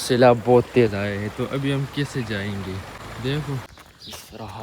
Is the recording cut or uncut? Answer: cut